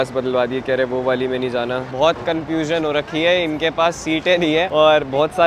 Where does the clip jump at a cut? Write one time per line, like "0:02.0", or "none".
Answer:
0:01.9